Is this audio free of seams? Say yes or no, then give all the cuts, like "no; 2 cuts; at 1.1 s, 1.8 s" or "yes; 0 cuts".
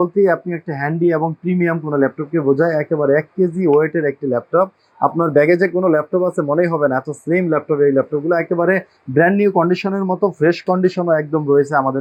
yes; 0 cuts